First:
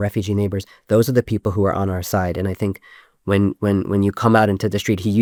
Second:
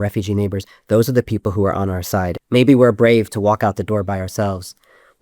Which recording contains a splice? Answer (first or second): second